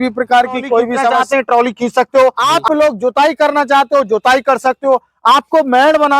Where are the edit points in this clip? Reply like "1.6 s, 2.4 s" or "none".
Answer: 1.2 s, 2.5 s